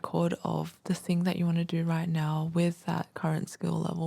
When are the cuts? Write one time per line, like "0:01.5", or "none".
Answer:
none